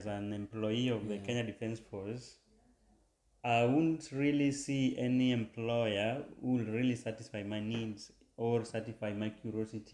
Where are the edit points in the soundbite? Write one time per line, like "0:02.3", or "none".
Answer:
none